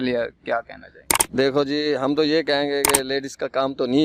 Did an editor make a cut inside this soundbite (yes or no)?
no